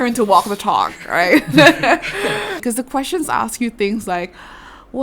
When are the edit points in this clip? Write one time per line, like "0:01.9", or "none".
0:02.6